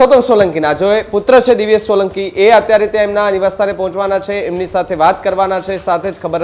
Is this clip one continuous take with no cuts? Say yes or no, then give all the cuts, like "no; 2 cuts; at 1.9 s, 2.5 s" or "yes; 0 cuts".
yes; 0 cuts